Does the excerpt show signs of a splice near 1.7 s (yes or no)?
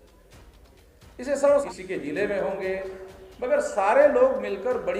yes